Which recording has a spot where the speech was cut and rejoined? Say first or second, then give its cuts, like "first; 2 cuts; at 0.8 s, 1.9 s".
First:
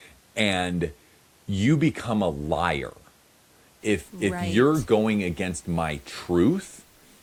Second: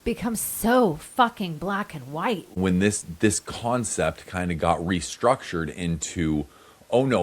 second; 1 cut; at 2.6 s